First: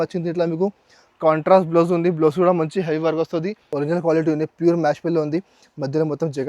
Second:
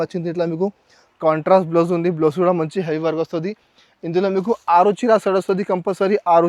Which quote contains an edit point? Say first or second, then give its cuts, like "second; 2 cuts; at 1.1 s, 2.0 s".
first; 1 cut; at 3.6 s